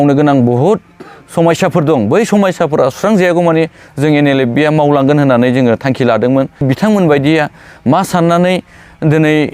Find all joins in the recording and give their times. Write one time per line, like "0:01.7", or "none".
0:06.6